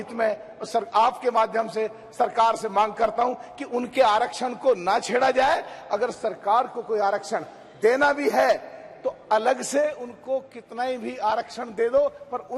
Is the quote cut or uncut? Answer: uncut